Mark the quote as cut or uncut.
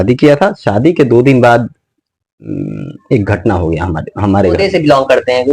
cut